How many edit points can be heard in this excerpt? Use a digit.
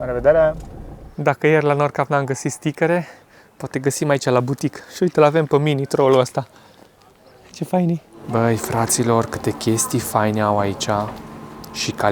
2